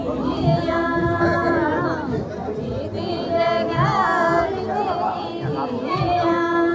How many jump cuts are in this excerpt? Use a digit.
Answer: 0